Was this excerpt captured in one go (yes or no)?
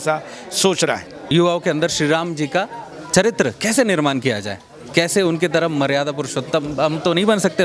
no